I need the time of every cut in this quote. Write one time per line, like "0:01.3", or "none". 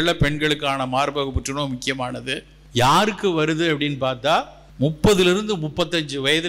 0:02.5
0:04.6